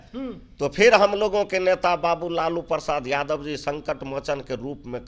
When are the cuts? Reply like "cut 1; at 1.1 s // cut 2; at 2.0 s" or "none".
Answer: none